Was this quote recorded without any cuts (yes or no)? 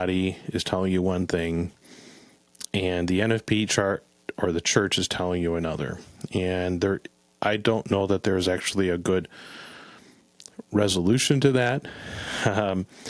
yes